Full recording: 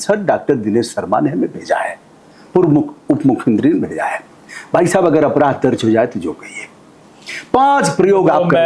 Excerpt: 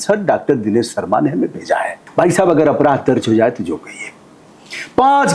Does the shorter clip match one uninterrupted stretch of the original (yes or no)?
no